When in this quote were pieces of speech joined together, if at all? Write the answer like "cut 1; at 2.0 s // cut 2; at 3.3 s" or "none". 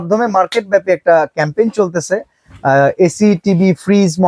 none